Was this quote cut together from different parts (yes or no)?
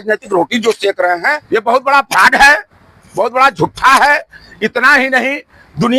yes